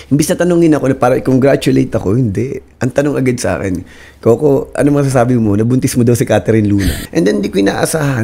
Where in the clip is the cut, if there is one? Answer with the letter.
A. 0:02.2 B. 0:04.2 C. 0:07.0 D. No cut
C